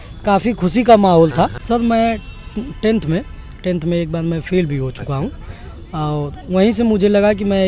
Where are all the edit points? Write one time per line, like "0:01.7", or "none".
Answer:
0:01.6

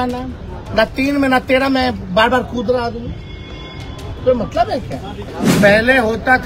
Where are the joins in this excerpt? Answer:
0:05.3

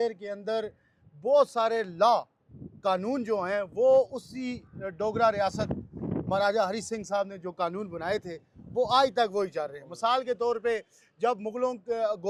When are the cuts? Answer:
none

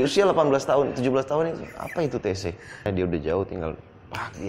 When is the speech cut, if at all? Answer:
0:02.8

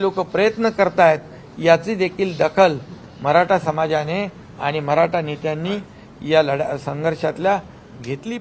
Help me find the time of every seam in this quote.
none

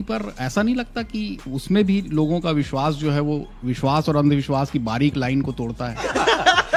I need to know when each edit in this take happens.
none

